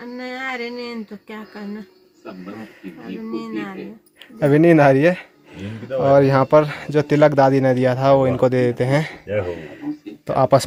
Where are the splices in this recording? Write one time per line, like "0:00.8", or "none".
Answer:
none